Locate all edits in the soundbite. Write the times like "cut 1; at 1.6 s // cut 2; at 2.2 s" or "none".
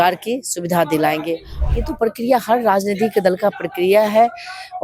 cut 1; at 1.5 s

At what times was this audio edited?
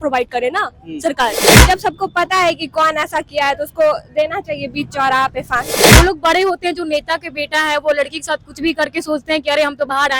cut 1; at 1.6 s // cut 2; at 5.8 s

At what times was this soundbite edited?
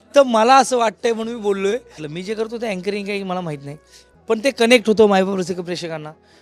cut 1; at 2.1 s

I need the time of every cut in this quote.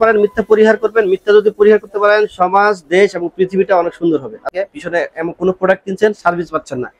cut 1; at 4.5 s

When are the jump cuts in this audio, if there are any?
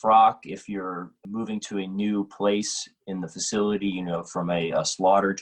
cut 1; at 1.2 s

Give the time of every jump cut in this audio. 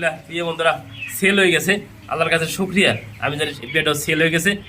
cut 1; at 3.5 s

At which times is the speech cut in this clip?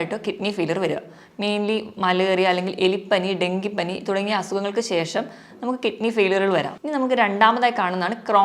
cut 1; at 6.8 s

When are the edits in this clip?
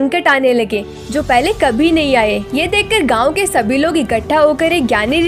none

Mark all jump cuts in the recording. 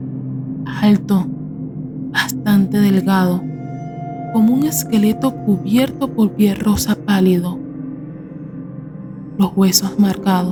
none

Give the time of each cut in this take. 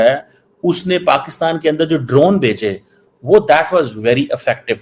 none

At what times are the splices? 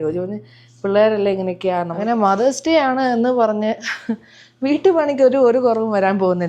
cut 1; at 1.9 s

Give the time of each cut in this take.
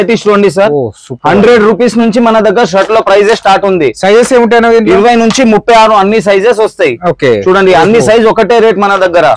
none

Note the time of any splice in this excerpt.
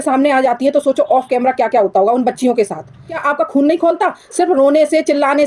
cut 1; at 3.2 s

